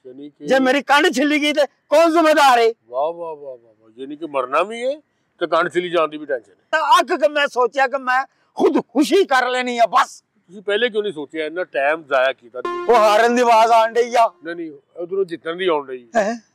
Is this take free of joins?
no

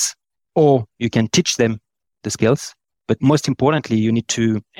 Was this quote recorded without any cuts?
yes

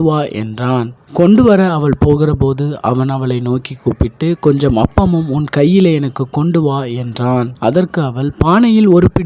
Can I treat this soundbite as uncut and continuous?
no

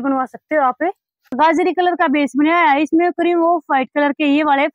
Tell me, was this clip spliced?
yes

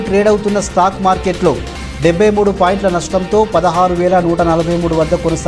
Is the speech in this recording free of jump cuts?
yes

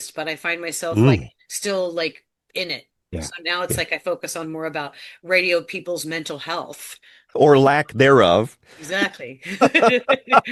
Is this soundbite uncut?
yes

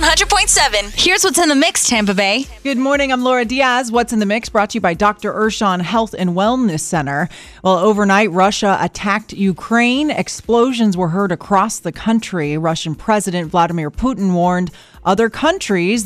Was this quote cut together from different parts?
yes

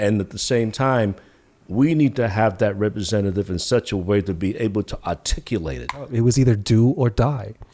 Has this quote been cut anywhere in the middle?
yes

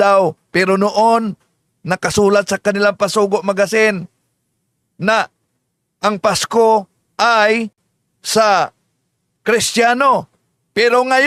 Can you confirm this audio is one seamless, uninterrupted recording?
yes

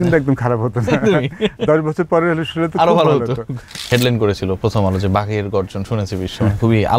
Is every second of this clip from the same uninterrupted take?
no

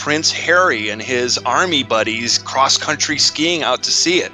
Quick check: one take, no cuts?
yes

